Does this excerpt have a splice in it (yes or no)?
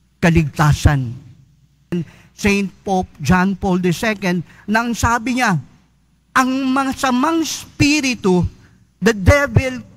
yes